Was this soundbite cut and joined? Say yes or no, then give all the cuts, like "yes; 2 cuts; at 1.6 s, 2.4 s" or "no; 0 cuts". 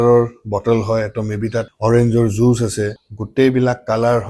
yes; 1 cut; at 3.0 s